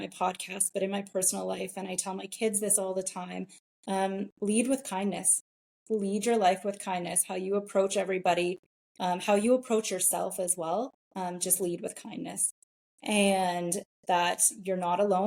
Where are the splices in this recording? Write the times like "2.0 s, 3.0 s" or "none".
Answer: none